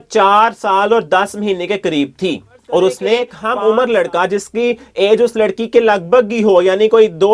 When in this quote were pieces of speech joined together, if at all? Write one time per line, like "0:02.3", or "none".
0:03.4

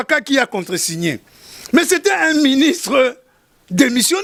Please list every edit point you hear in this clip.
none

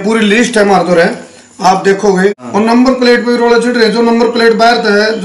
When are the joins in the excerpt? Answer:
0:02.4

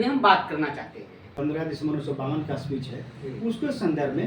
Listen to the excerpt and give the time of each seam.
0:01.3

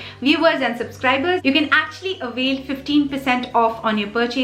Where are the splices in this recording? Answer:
0:01.4

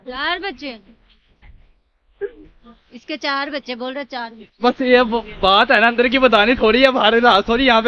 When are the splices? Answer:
0:04.5

